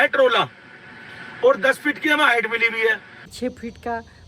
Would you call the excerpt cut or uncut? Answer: cut